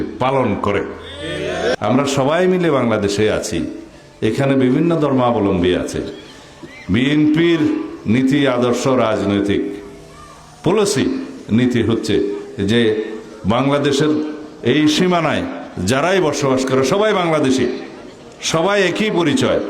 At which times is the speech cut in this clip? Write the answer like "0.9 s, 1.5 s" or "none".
1.7 s